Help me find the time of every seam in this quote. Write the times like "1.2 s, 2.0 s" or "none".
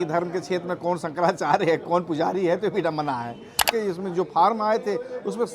3.6 s